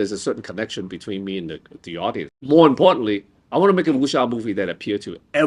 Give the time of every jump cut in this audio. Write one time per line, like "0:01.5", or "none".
0:02.4